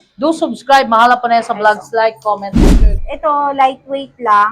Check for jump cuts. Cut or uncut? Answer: cut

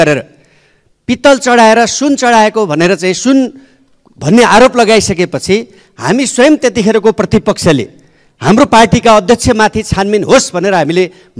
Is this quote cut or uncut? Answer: uncut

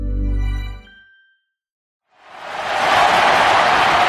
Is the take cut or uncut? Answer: cut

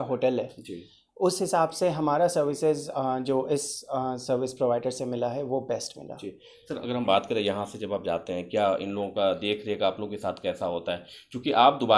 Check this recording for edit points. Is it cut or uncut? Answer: uncut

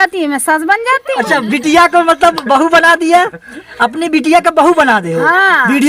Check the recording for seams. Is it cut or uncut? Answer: uncut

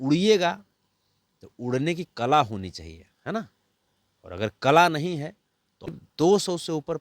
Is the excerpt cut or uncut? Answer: cut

